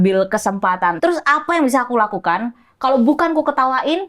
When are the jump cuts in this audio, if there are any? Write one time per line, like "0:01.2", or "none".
0:01.0